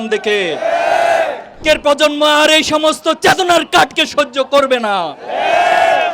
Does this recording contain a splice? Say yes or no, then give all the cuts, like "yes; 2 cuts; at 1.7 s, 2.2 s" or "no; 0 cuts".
yes; 1 cut; at 1.6 s